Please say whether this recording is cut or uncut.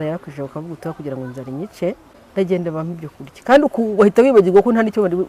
cut